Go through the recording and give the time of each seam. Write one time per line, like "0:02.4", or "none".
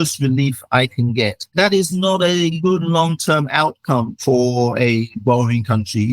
0:01.4
0:02.6
0:04.1